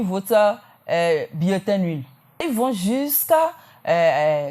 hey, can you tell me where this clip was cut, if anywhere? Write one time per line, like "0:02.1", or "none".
0:02.5